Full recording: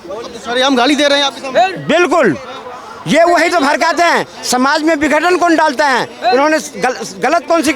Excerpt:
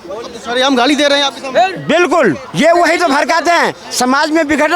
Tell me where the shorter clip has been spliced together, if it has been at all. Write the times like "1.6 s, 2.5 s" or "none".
2.5 s